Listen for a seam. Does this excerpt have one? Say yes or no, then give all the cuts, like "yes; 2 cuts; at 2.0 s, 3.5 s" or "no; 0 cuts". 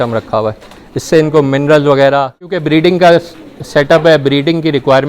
yes; 1 cut; at 2.6 s